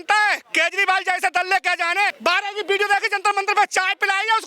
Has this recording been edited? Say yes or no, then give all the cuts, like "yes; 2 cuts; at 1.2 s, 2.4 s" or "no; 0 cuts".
yes; 1 cut; at 2.2 s